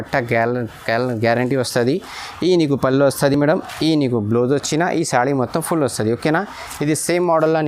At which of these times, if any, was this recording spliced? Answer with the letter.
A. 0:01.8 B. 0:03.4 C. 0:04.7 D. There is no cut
D